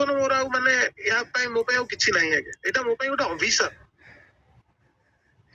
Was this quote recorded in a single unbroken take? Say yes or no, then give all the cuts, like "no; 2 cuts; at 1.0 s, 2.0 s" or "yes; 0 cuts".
yes; 0 cuts